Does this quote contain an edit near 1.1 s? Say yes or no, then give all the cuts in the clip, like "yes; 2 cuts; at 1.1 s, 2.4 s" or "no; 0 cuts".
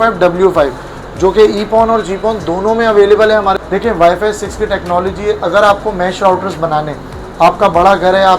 no; 1 cut; at 3.6 s